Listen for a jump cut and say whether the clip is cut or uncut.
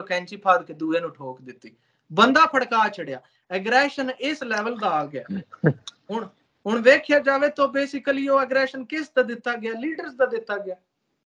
uncut